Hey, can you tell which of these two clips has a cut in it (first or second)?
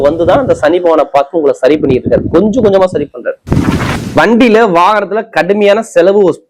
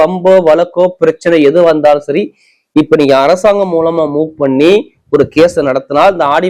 first